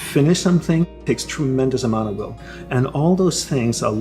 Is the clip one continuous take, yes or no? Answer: no